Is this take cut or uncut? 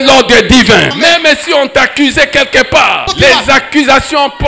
cut